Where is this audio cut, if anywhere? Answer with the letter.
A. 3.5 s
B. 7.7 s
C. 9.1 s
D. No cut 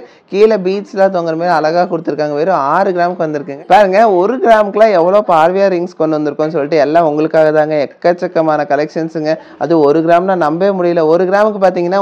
A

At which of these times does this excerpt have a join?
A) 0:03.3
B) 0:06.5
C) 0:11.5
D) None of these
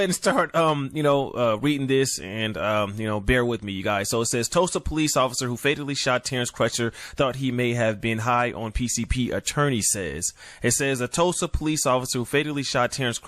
A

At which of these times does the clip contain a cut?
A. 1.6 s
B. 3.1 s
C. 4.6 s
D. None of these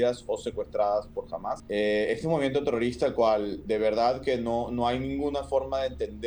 A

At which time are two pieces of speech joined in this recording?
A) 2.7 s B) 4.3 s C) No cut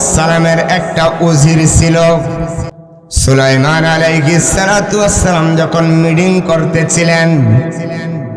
A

